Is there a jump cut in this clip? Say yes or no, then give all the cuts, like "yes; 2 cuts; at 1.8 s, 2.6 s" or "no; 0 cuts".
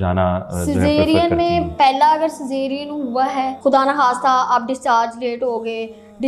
yes; 1 cut; at 3.6 s